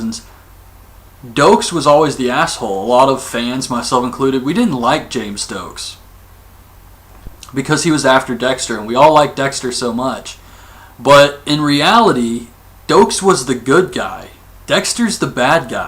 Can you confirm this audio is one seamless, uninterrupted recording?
no; 1 cut; at 11.1 s

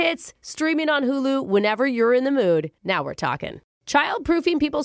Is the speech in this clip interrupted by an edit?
yes; 1 cut; at 3.7 s

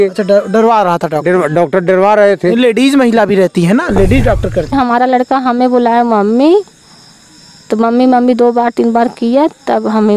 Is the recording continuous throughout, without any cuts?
no; 1 cut; at 4.7 s

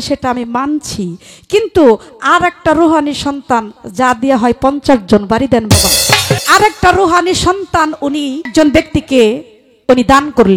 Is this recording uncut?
no; 2 cuts; at 6.4 s, 8.5 s

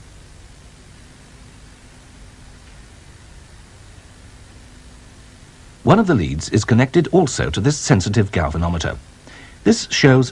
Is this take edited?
yes; 1 cut; at 7.8 s

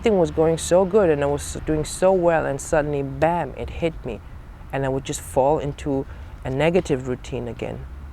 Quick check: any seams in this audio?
no; 0 cuts

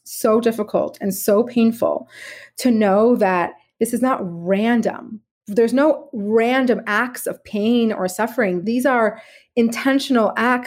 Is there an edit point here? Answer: yes; 1 cut; at 8.6 s

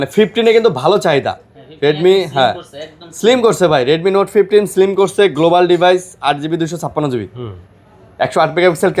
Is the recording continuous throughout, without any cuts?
yes; 0 cuts

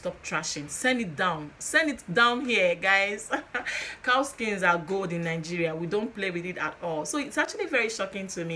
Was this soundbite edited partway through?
no; 0 cuts

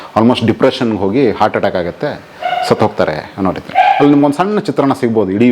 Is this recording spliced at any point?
no; 0 cuts

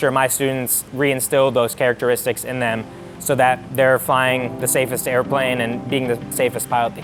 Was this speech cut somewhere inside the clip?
no; 0 cuts

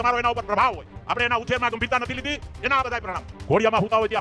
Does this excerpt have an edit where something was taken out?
yes; 2 cuts; at 0.9 s, 3.3 s

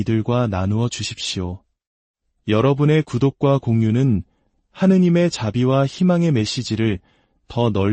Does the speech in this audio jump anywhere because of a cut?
no; 0 cuts

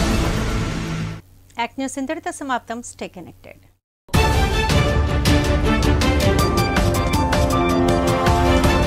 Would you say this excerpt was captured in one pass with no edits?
yes; 0 cuts

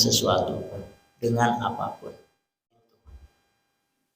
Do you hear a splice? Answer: yes; 1 cut; at 3.0 s

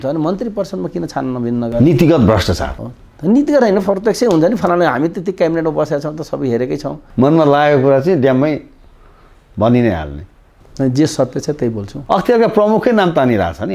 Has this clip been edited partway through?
yes; 1 cut; at 7.0 s

